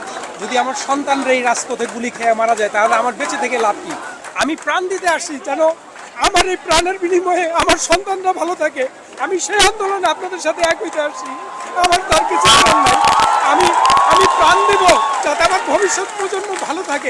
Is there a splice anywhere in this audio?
no; 0 cuts

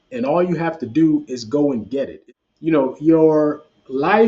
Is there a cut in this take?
yes; 1 cut; at 2.2 s

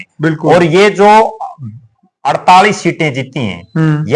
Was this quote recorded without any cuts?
yes; 0 cuts

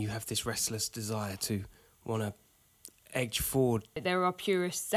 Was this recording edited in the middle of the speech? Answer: yes; 1 cut; at 4.0 s

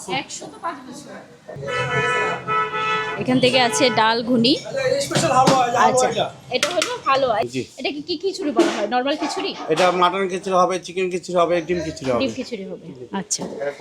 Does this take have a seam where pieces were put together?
yes; 2 cuts; at 1.5 s, 7.5 s

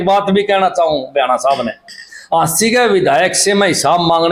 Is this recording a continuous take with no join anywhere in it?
yes; 0 cuts

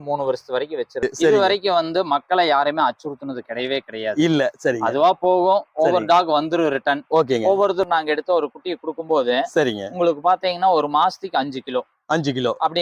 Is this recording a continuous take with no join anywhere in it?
no; 2 cuts; at 1.0 s, 7.8 s

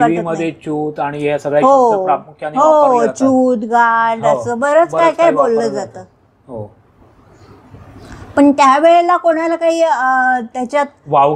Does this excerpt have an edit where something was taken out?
no; 0 cuts

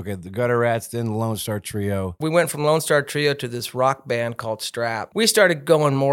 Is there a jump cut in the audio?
yes; 2 cuts; at 2.2 s, 5.0 s

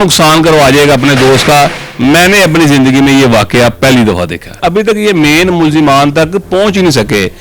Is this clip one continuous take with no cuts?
no; 1 cut; at 4.6 s

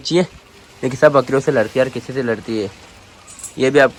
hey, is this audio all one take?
yes; 0 cuts

